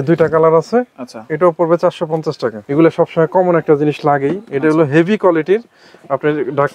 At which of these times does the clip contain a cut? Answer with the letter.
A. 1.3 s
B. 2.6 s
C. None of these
B